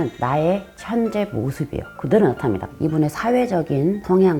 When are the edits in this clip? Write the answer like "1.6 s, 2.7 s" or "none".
2.7 s